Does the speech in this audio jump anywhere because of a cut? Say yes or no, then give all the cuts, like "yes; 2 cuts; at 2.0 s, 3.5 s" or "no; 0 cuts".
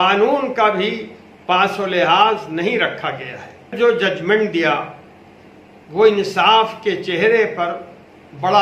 yes; 1 cut; at 3.7 s